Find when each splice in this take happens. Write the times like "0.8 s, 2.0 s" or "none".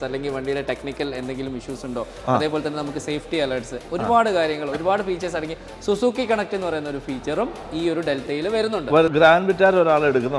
9.1 s